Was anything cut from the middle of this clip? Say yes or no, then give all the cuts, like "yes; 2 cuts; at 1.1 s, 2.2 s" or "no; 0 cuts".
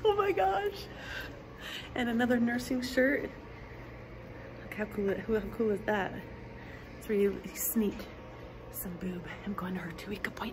no; 0 cuts